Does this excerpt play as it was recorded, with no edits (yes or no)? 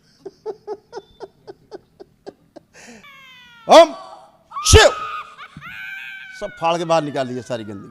no